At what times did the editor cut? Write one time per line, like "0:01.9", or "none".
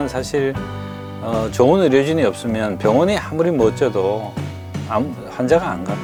none